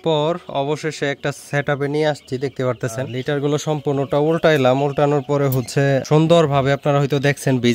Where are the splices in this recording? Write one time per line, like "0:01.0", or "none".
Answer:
0:03.2
0:06.0

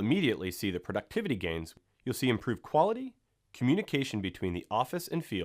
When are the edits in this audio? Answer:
0:01.8

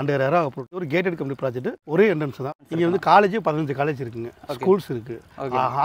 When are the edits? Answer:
0:00.8
0:01.8
0:02.6

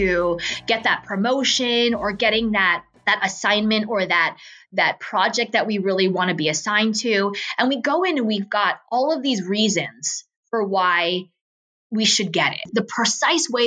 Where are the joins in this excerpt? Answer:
0:02.9
0:12.7

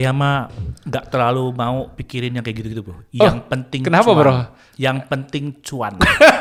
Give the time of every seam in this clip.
none

